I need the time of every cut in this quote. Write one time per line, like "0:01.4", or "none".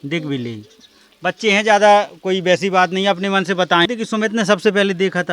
0:03.9